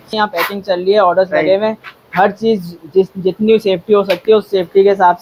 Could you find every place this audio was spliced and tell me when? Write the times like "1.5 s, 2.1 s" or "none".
none